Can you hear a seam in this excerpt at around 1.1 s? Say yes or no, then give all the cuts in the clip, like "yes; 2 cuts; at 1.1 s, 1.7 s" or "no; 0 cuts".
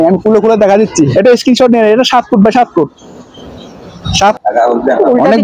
yes; 2 cuts; at 1.1 s, 4.4 s